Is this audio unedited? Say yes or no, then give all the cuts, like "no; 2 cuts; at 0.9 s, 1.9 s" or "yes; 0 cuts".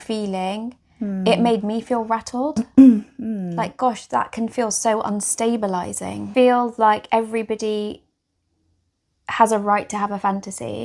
no; 1 cut; at 6.3 s